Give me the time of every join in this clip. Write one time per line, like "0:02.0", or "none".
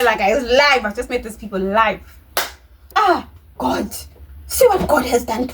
0:02.9